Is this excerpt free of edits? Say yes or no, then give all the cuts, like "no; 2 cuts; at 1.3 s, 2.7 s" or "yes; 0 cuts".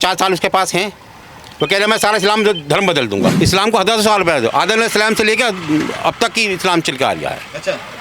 no; 1 cut; at 3.3 s